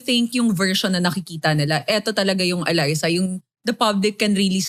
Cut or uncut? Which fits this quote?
uncut